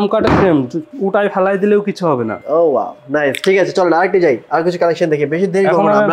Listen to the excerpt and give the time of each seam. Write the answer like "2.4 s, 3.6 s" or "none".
none

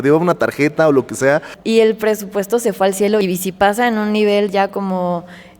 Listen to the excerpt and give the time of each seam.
1.5 s, 3.2 s

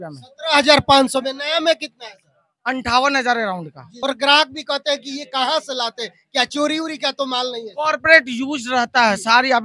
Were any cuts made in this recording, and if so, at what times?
3.8 s

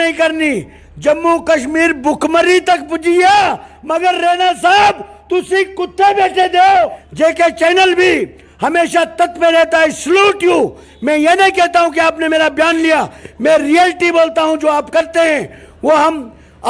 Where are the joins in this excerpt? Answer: 6.9 s

